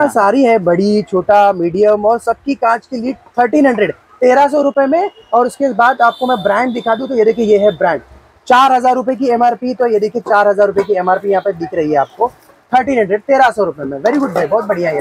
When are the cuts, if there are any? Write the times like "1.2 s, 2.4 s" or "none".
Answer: none